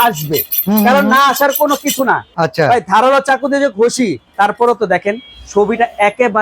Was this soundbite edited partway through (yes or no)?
yes